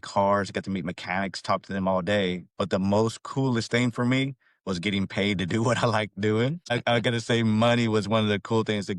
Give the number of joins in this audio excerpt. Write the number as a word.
one